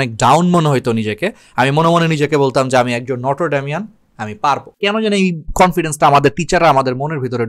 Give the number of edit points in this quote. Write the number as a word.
zero